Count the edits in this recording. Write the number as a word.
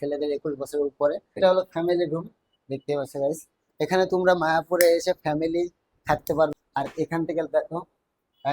one